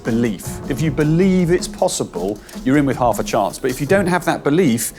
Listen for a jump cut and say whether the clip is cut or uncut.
uncut